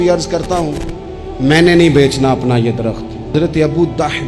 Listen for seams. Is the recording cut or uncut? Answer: cut